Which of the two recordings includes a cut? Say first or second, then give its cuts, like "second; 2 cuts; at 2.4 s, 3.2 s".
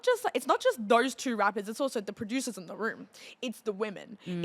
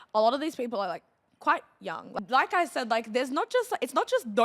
second; 1 cut; at 2.1 s